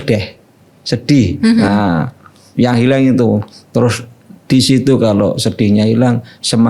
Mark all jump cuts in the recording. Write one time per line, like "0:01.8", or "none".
none